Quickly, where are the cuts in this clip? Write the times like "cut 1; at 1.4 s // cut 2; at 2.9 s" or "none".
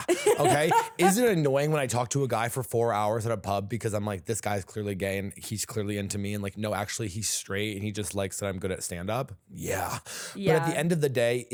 none